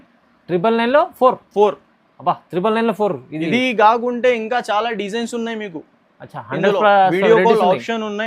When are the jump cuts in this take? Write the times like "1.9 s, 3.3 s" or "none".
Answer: none